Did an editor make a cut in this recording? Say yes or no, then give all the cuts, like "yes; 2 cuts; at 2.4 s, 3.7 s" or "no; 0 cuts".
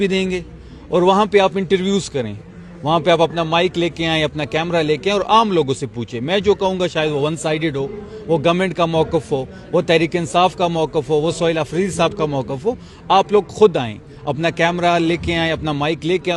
no; 0 cuts